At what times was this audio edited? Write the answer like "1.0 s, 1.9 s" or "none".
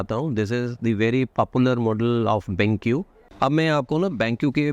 3.3 s